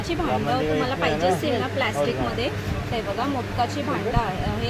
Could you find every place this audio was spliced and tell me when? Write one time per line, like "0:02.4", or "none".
none